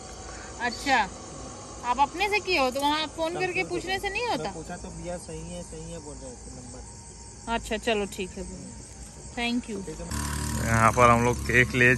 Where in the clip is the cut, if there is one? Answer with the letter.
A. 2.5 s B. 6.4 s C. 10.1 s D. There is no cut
C